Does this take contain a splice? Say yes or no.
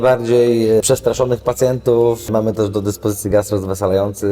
yes